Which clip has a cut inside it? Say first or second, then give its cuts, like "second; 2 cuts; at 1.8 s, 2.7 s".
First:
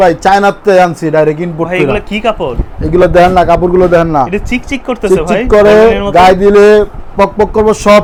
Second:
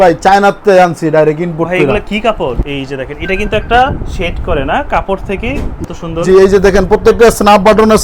second; 2 cuts; at 2.7 s, 5.8 s